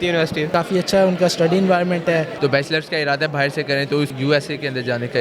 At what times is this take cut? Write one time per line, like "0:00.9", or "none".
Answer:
0:02.3
0:04.1